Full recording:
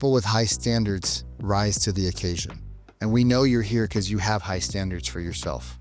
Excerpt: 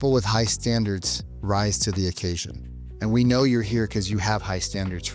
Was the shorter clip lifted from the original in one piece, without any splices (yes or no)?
yes